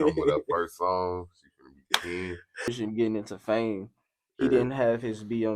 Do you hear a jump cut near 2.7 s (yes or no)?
yes